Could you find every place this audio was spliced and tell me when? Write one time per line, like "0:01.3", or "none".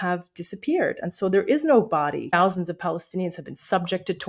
0:02.3